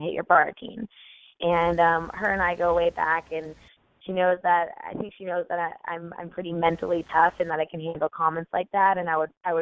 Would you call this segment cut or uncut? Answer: uncut